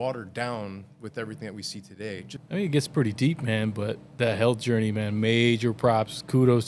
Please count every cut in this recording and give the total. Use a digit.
1